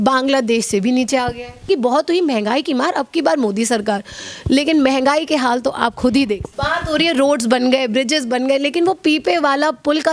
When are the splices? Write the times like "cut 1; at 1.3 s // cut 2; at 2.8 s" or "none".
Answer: cut 1; at 1.7 s // cut 2; at 6.5 s